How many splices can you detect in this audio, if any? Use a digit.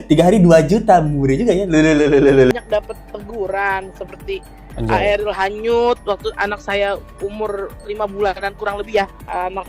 1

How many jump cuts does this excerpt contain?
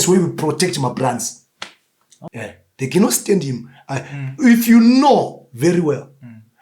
1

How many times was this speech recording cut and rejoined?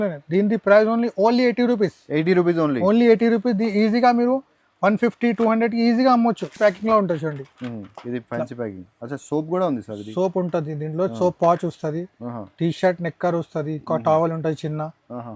0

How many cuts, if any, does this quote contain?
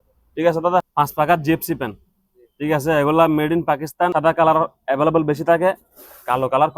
2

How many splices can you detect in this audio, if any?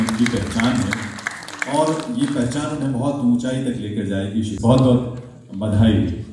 1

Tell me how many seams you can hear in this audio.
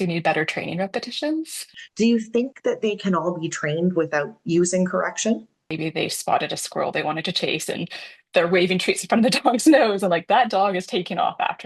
2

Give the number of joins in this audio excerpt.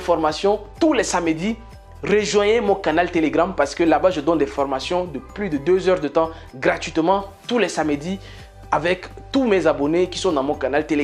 0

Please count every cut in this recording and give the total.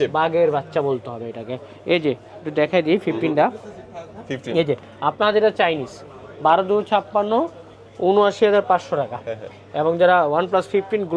0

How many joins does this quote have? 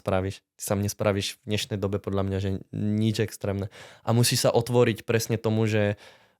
0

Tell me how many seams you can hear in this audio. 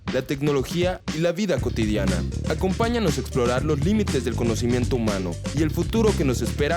1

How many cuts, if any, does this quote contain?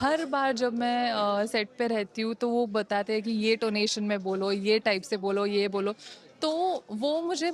0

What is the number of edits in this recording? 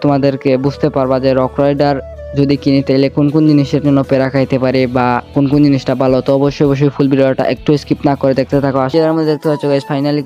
1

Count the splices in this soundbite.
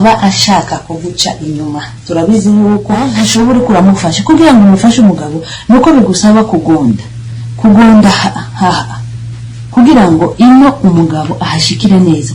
1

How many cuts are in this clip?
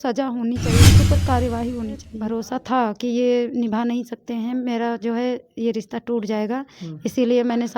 1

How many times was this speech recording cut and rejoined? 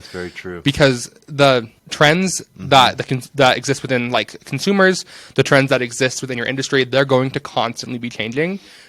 1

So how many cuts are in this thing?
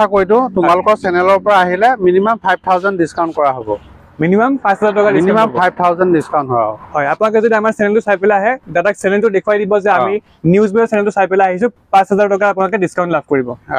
0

